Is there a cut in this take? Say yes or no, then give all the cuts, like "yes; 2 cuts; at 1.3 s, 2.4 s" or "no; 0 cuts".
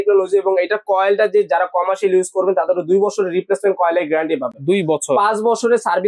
no; 0 cuts